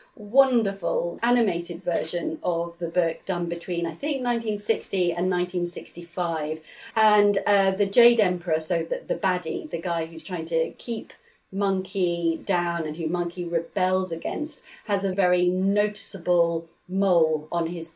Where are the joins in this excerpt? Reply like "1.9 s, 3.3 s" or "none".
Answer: 1.2 s, 6.7 s, 15.1 s